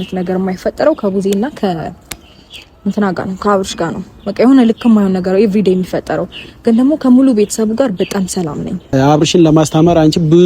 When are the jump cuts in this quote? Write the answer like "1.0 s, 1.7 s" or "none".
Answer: 8.7 s